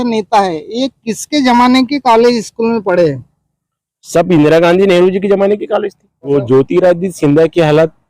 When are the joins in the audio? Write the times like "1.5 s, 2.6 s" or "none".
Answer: 6.3 s